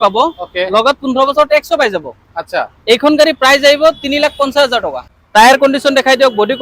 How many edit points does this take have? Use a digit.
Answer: 1